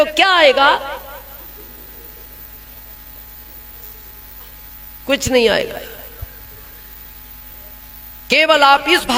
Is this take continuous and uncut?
yes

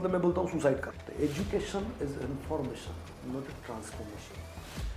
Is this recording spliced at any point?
yes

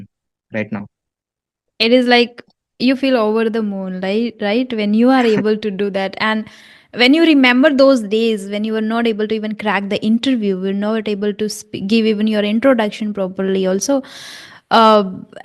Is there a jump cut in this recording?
no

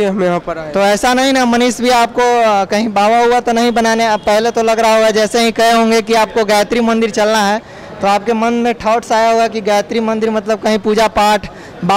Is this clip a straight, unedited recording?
yes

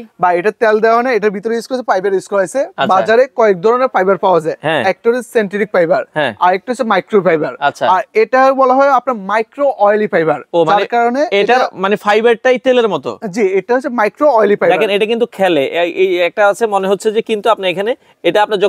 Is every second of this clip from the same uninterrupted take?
yes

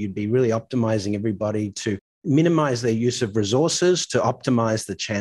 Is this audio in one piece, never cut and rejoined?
yes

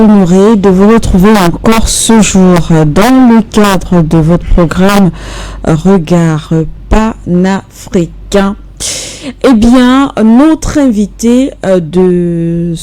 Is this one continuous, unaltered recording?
yes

